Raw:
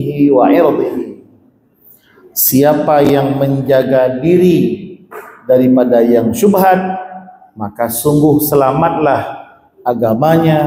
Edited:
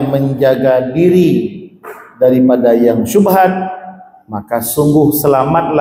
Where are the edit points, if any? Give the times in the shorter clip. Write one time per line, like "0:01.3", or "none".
none